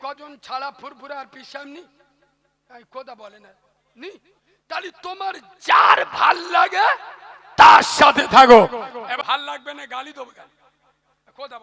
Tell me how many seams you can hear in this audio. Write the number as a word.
one